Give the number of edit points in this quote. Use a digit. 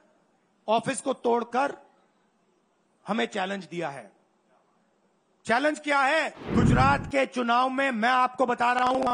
1